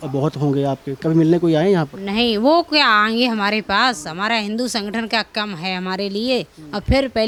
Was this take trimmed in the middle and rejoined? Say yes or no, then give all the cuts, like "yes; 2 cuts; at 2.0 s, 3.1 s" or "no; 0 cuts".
no; 0 cuts